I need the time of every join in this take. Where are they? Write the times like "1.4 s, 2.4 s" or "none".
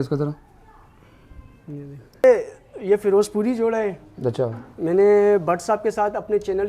2.2 s